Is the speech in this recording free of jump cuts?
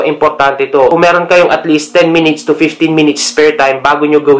no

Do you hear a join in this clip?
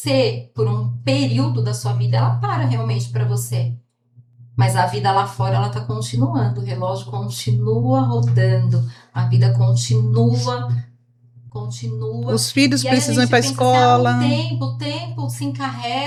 no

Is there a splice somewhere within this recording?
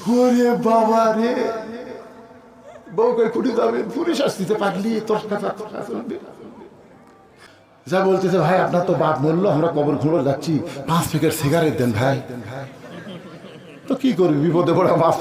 yes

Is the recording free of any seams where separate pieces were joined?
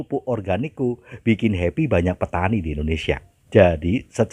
yes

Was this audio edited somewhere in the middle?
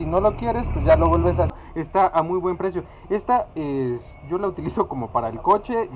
yes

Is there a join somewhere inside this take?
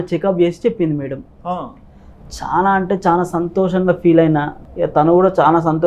yes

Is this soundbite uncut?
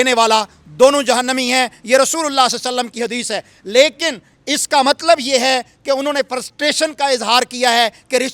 yes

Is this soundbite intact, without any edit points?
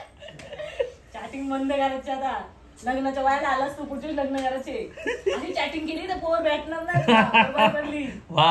yes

